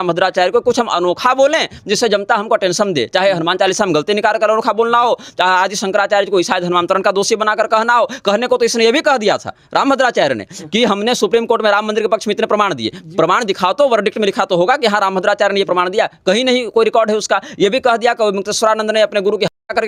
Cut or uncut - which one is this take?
uncut